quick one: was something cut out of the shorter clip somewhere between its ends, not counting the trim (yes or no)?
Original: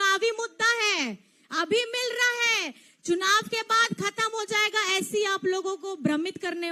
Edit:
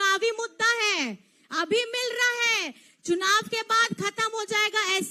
no